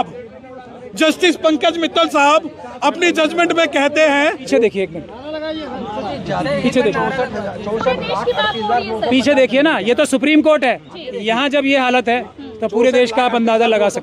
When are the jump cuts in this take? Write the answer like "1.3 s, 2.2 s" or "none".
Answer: 4.5 s